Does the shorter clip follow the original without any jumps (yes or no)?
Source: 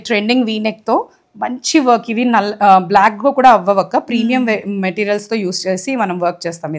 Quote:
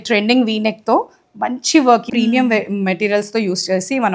no